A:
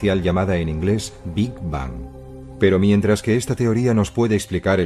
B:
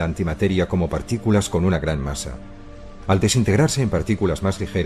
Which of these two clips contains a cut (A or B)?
B